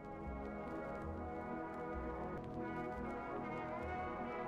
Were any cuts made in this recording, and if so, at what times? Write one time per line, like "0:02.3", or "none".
0:02.4